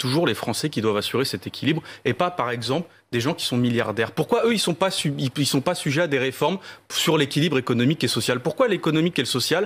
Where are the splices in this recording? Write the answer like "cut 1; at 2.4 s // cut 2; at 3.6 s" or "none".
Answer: none